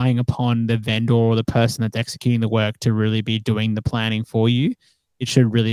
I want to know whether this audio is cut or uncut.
uncut